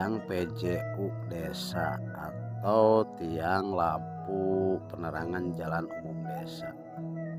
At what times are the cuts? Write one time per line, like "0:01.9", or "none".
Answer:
none